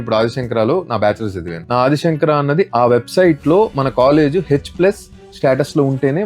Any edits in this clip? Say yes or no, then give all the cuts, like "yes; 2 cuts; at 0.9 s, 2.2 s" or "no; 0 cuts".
yes; 1 cut; at 1.5 s